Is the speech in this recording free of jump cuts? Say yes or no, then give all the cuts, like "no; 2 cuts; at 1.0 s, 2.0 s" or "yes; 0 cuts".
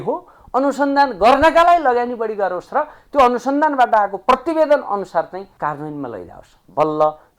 no; 1 cut; at 5.5 s